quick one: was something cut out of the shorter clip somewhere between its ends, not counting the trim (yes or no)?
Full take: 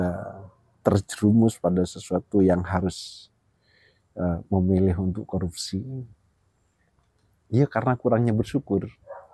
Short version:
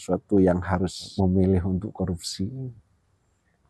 yes